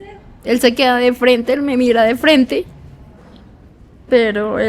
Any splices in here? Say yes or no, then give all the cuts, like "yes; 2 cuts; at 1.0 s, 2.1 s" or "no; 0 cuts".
no; 0 cuts